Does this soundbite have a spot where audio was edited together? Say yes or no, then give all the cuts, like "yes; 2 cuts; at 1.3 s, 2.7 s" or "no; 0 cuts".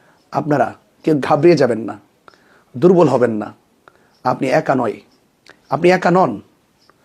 no; 0 cuts